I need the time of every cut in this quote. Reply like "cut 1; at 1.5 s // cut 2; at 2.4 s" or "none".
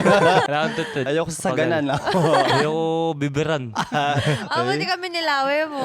cut 1; at 1.0 s